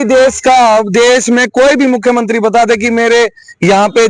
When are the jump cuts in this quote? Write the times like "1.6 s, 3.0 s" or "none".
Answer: none

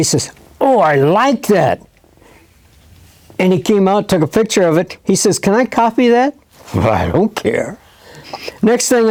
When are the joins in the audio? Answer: none

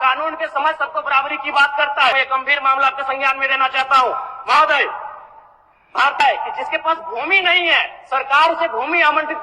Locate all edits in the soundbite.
2.1 s, 6.2 s

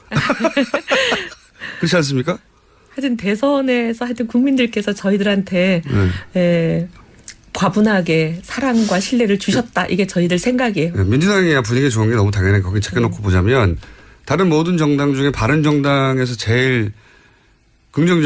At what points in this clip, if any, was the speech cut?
none

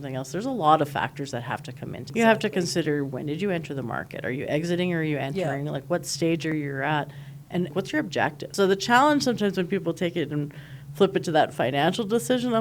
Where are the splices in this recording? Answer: 2.0 s, 7.7 s

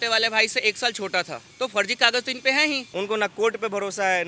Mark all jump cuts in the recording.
1.4 s, 2.9 s

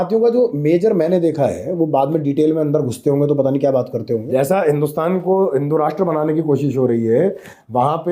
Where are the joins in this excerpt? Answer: 4.2 s

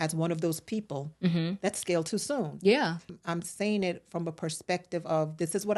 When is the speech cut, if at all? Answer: 3.1 s

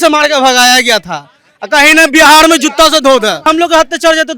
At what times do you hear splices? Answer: 3.5 s

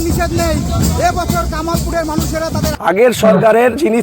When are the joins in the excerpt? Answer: 2.7 s

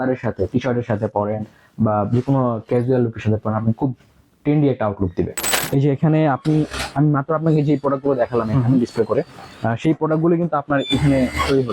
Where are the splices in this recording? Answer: 5.5 s

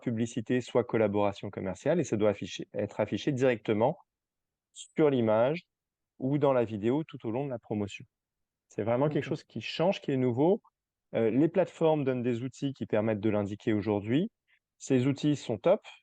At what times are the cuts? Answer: none

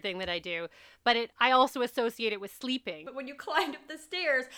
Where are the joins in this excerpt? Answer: 3.0 s

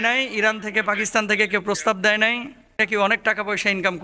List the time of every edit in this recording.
2.7 s

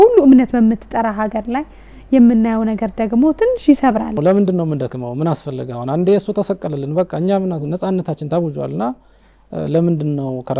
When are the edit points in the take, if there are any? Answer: 4.2 s

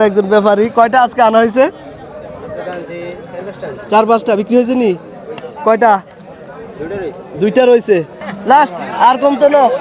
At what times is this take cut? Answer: 8.2 s

